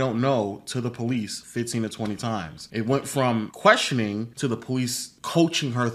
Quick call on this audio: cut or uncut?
uncut